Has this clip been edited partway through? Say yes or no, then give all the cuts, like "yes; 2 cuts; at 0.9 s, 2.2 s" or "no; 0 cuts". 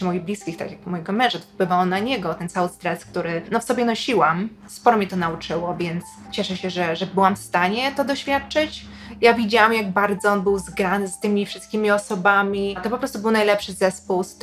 yes; 5 cuts; at 3.4 s, 4.6 s, 6.2 s, 9.0 s, 12.8 s